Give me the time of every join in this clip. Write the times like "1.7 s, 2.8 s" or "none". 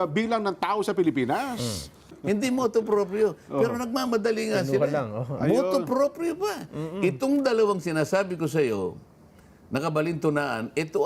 2.2 s